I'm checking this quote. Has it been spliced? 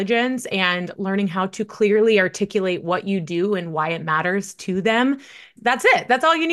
yes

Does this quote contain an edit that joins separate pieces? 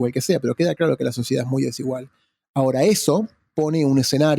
yes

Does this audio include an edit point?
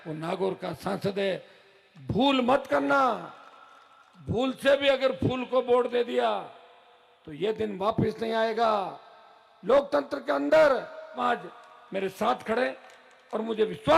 yes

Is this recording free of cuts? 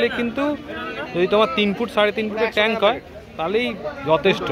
yes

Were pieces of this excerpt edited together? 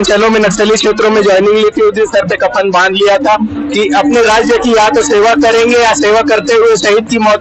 no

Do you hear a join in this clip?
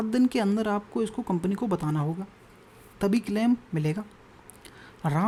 no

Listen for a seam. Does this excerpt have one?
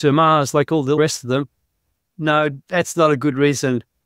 yes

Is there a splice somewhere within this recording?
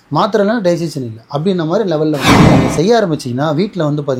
yes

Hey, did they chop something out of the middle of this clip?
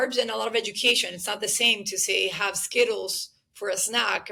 no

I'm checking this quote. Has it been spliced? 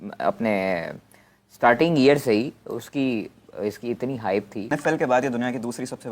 yes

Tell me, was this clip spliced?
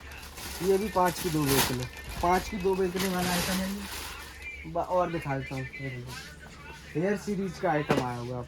no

